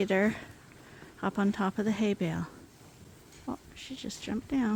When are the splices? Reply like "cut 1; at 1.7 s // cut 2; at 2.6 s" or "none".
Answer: none